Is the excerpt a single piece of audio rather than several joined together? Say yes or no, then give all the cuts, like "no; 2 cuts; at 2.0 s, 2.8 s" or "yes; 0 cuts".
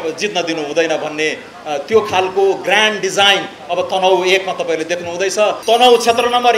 no; 1 cut; at 5.6 s